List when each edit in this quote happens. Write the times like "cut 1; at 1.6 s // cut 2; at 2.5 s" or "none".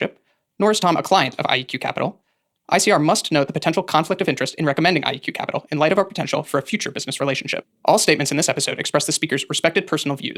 none

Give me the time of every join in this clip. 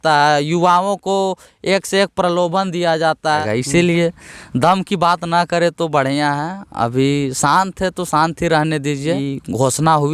cut 1; at 3.4 s // cut 2; at 9.2 s

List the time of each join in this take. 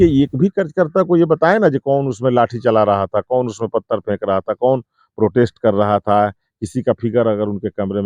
none

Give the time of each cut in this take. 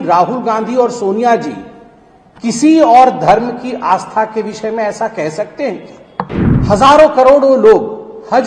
cut 1; at 6.5 s

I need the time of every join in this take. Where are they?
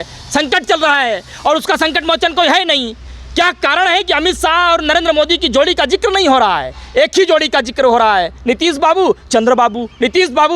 none

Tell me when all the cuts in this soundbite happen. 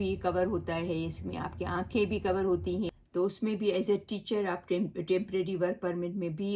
cut 1; at 3.0 s

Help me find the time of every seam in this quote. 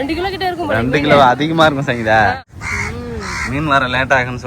cut 1; at 2.4 s

